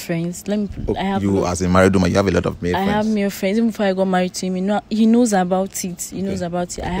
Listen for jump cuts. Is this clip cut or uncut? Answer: uncut